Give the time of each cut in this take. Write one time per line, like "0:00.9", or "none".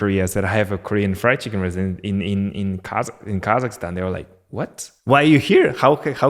none